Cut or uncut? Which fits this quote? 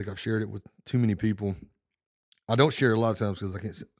uncut